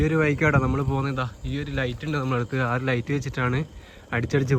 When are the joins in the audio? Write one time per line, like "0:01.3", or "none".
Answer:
none